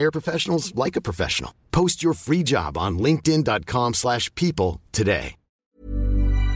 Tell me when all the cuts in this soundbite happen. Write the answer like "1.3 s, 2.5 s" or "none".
5.6 s